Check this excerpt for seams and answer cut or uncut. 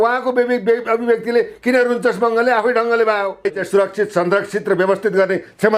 cut